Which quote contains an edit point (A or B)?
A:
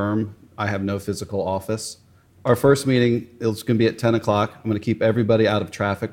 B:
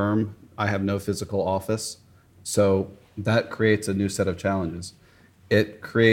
A